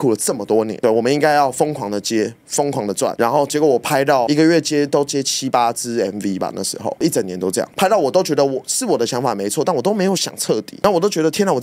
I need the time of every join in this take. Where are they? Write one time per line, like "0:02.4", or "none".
none